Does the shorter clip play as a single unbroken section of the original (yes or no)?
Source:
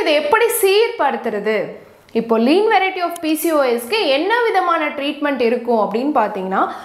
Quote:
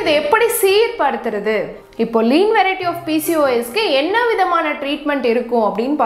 no